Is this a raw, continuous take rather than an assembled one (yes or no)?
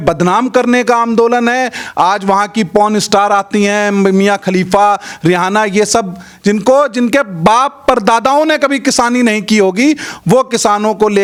yes